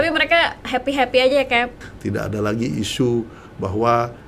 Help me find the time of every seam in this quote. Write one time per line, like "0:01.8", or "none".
0:01.7